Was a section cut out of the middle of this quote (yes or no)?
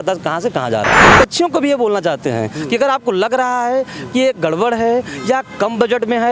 yes